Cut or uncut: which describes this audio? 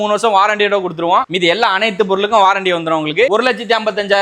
cut